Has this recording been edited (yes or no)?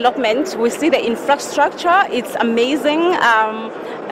no